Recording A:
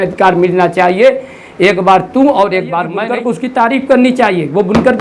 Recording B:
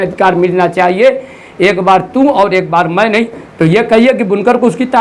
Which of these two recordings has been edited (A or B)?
A